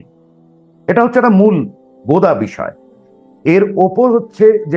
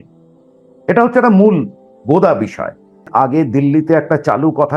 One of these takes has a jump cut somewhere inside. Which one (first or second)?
second